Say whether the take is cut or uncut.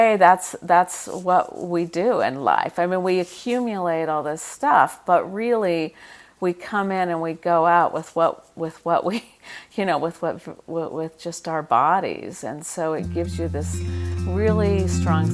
uncut